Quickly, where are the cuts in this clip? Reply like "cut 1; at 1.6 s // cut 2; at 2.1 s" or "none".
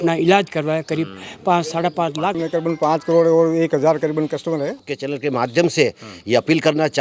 cut 1; at 2.4 s // cut 2; at 4.9 s

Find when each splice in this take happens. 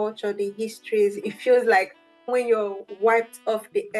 cut 1; at 1.1 s // cut 2; at 2.3 s

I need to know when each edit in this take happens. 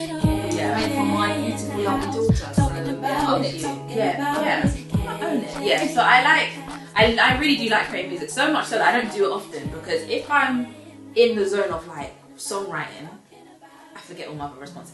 none

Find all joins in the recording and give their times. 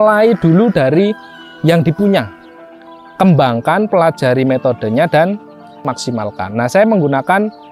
cut 1; at 5.8 s

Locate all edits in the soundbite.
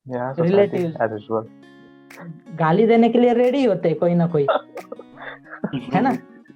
none

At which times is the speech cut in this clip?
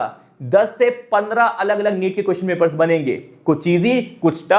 none

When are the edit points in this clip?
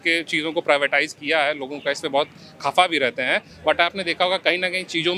none

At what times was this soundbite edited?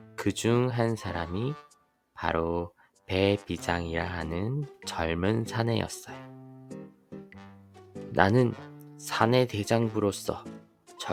none

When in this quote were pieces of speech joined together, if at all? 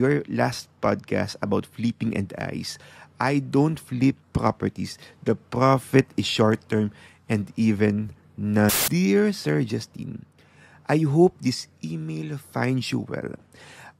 cut 1; at 8.7 s

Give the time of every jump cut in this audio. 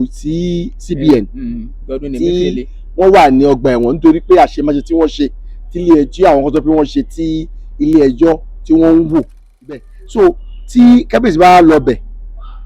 cut 1; at 9.9 s

